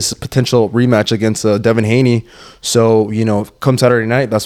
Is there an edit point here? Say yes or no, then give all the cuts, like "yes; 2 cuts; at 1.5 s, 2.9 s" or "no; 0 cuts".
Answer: no; 0 cuts